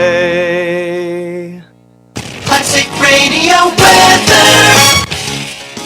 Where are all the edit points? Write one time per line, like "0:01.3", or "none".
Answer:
0:02.3